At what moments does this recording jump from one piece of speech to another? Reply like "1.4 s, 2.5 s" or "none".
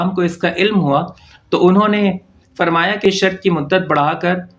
3.0 s